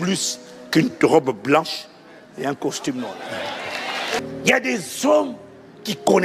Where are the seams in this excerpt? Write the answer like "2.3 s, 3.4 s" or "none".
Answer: 4.2 s